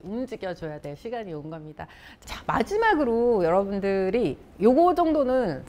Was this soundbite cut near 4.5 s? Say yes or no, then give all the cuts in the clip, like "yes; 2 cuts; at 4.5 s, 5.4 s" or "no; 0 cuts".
no; 1 cut; at 2.1 s